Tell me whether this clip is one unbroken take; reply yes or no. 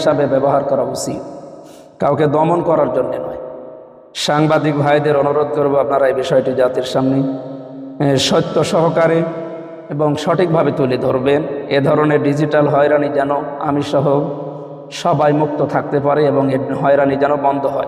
yes